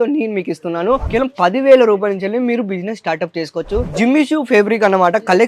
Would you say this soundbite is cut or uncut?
cut